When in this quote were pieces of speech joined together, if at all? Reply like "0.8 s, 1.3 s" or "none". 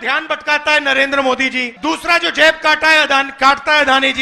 1.7 s